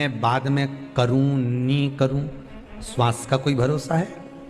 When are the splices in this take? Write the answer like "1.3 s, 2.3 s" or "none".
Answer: none